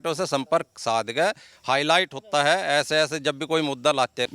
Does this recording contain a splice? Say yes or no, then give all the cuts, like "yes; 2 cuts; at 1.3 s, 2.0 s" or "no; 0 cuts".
no; 0 cuts